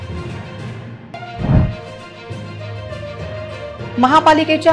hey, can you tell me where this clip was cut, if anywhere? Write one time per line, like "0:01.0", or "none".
0:00.9